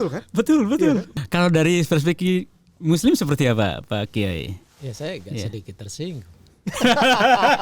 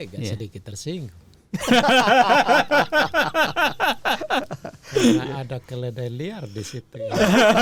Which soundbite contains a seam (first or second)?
first